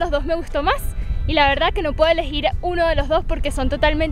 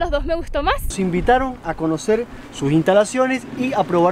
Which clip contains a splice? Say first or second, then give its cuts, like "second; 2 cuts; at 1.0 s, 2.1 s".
second; 1 cut; at 0.9 s